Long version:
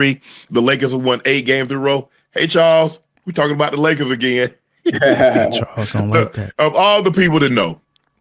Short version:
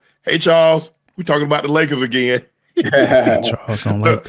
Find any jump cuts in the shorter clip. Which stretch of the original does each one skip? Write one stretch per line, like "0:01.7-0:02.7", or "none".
none